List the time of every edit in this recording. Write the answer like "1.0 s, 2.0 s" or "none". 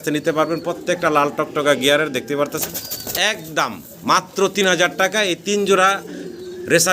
2.6 s